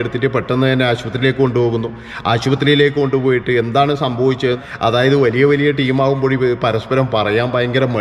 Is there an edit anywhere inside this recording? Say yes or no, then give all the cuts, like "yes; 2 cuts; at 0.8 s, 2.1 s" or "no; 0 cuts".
yes; 1 cut; at 4.6 s